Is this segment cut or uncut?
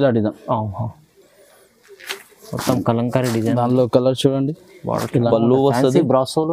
cut